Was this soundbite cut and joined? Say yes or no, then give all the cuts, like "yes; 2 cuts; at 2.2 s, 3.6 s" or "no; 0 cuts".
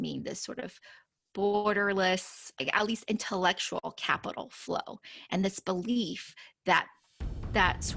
yes; 1 cut; at 7.0 s